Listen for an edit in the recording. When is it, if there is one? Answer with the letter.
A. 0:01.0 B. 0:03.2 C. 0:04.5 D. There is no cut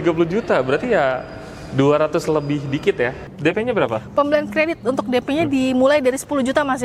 B